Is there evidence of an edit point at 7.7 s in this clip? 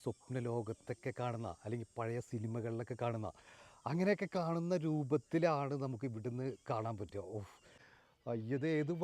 yes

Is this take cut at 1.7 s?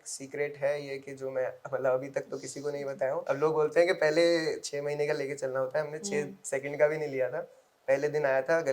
no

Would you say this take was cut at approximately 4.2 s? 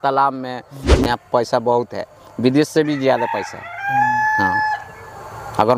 no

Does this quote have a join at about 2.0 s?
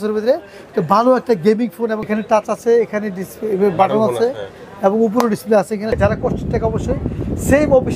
yes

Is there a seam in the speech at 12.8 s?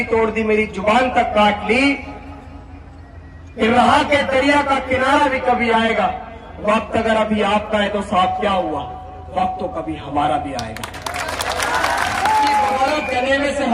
yes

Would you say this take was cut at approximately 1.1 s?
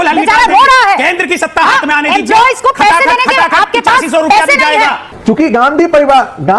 no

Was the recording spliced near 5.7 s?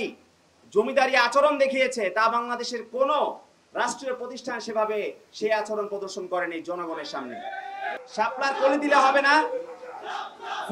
no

